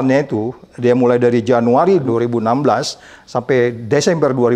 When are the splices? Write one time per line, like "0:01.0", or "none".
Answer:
none